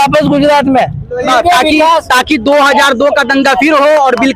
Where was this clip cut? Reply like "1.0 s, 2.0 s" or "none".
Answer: 1.3 s